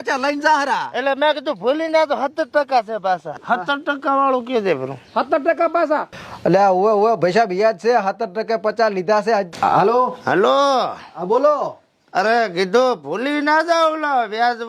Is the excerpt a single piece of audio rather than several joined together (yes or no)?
no